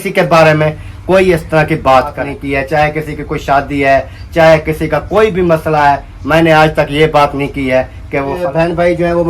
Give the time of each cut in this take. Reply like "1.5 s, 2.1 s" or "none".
2.3 s, 8.4 s